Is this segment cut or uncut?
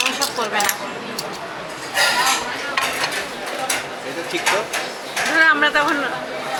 uncut